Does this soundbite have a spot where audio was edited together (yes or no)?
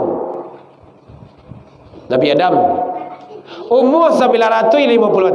no